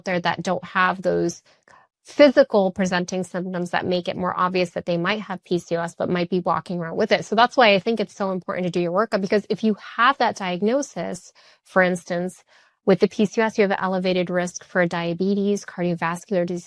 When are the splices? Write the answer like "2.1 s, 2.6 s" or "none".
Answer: none

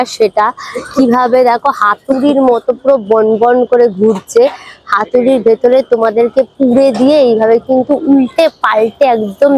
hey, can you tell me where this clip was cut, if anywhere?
none

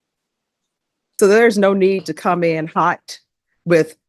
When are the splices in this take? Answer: 1.0 s

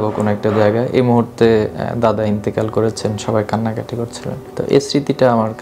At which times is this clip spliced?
none

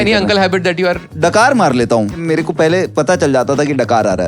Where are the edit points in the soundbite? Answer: 1.1 s, 2.2 s

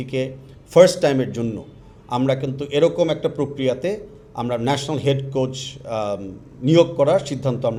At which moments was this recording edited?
none

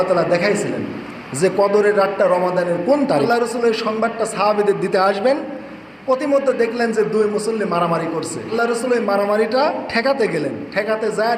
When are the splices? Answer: 3.3 s, 8.5 s

